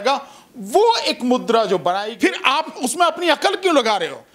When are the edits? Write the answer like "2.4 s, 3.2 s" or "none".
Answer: 2.1 s